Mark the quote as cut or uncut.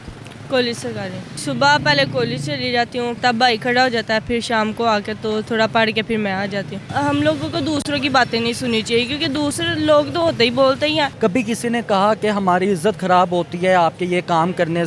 cut